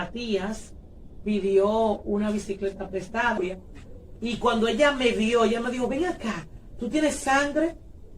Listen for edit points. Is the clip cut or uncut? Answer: cut